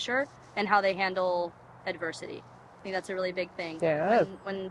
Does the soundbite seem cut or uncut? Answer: uncut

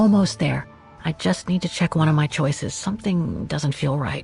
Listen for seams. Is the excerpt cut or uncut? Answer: uncut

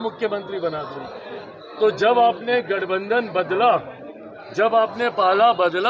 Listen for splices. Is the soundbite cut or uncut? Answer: uncut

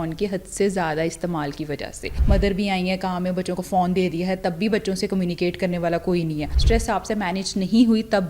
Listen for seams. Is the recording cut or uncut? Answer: cut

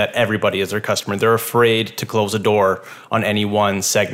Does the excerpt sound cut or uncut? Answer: uncut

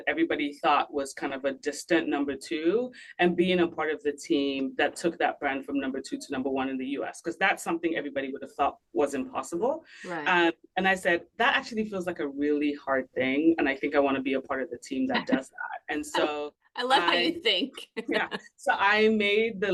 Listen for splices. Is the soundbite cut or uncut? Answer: uncut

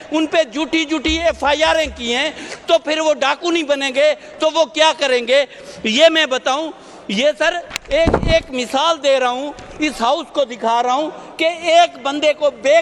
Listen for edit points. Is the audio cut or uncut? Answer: uncut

